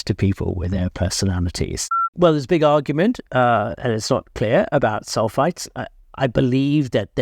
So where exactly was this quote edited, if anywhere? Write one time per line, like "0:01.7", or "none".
0:02.0